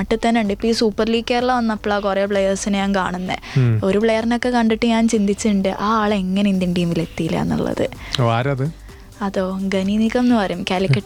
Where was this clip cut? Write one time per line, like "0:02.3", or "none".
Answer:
none